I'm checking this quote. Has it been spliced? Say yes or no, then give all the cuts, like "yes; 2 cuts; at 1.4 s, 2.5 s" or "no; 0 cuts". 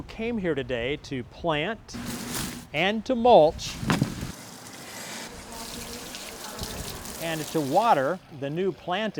no; 0 cuts